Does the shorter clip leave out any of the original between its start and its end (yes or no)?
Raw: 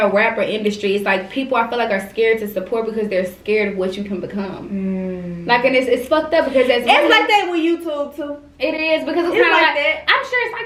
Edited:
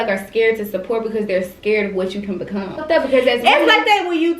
yes